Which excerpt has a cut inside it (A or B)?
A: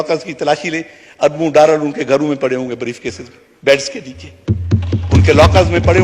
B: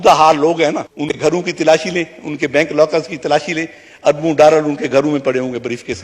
B